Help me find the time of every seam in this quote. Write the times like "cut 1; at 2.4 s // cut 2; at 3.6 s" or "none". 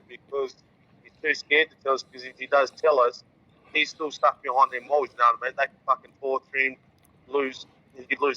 none